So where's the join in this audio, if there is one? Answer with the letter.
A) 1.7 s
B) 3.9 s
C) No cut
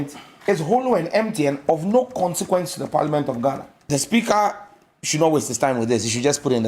B